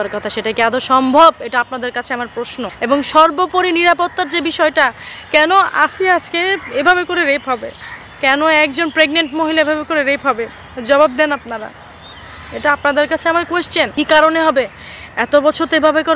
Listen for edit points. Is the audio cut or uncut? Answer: cut